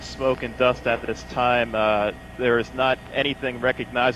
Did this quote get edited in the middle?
yes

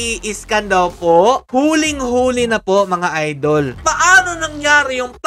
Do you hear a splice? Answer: yes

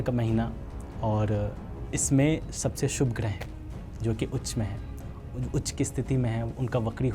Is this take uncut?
yes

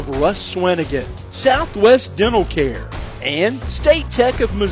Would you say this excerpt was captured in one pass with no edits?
yes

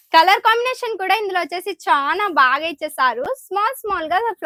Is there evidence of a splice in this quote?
no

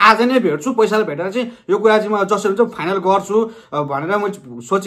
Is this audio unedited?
yes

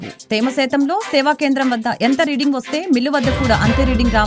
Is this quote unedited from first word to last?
yes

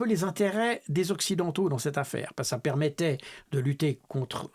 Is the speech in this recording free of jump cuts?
yes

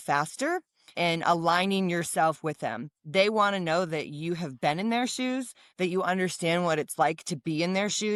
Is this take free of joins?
yes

